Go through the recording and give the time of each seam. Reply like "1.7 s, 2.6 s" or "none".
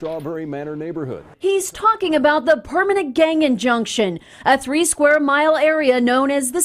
1.7 s